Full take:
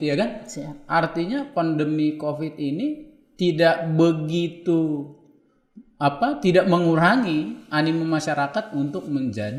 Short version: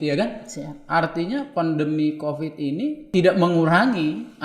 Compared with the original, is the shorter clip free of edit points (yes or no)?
no